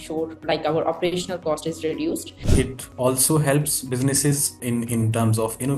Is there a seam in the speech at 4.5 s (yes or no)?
yes